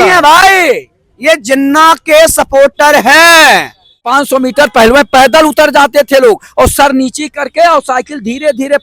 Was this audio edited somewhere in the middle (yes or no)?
yes